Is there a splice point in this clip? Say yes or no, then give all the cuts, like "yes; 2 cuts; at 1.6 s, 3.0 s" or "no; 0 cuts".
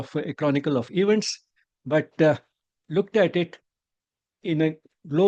no; 0 cuts